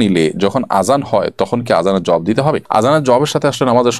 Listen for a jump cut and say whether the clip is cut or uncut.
uncut